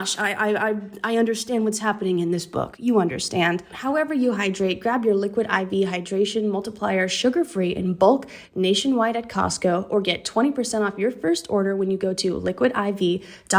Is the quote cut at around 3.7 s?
yes; 1 cut; at 3.7 s

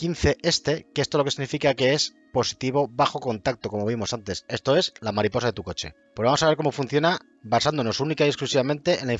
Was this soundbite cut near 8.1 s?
no; 1 cut; at 4.4 s

